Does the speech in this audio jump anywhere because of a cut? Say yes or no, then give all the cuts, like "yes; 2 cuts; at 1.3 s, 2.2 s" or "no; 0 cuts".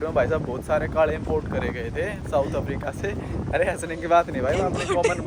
no; 0 cuts